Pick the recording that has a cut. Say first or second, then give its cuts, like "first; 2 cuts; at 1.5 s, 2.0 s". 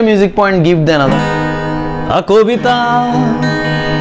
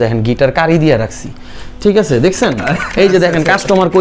first; 1 cut; at 1.1 s